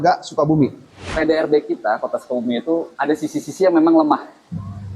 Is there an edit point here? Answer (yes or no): yes